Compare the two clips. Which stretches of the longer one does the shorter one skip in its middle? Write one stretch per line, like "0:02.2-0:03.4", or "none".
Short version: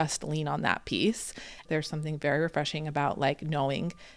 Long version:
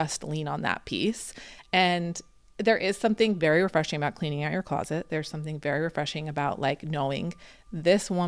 0:01.6-0:05.0